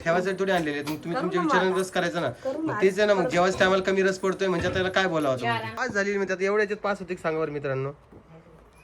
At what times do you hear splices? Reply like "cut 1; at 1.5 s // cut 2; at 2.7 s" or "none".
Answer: cut 1; at 5.7 s